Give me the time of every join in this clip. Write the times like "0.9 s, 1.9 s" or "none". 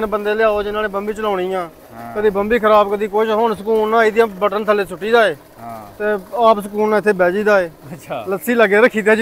none